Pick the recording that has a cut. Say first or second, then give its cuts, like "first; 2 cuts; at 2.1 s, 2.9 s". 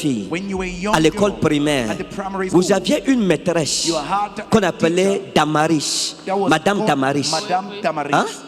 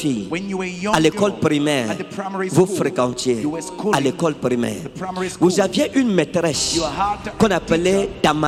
first; 1 cut; at 2.5 s